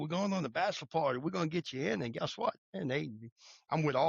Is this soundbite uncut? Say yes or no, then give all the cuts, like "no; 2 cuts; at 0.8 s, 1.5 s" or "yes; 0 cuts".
no; 1 cut; at 2.7 s